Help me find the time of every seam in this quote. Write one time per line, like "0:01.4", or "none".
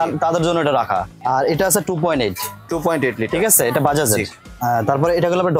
0:01.1
0:04.4